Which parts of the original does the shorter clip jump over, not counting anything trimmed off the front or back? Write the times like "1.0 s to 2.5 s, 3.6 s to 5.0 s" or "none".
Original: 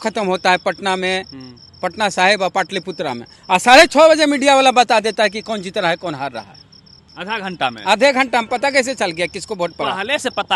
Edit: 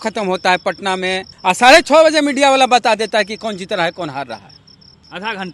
1.3 s to 3.3 s